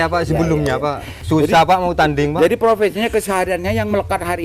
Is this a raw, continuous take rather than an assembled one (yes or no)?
no